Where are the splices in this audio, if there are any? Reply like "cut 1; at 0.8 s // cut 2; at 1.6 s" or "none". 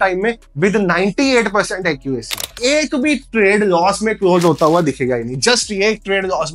cut 1; at 2.5 s